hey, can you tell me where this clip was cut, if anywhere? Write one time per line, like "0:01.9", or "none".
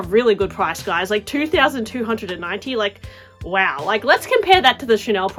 none